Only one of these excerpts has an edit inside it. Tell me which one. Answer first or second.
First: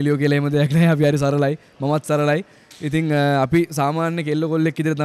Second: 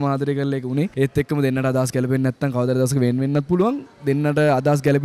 second